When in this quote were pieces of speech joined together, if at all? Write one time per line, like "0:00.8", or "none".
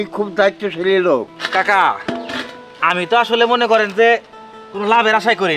none